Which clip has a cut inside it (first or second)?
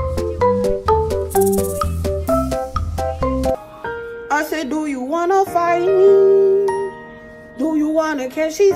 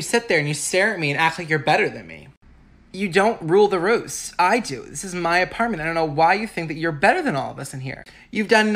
first